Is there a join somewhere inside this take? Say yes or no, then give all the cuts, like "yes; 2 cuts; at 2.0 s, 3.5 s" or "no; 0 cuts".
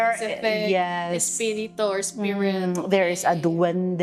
no; 0 cuts